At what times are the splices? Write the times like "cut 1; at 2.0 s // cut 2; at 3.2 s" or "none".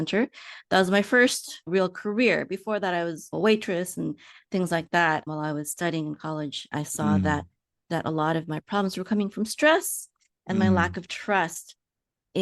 cut 1; at 6.7 s